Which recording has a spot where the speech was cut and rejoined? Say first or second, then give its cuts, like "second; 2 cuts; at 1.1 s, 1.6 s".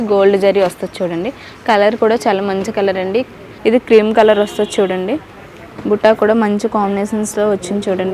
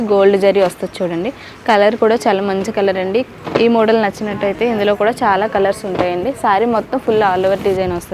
first; 1 cut; at 3.4 s